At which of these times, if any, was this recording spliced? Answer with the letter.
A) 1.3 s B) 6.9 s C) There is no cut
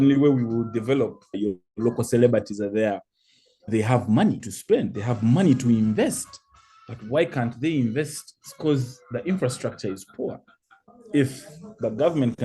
A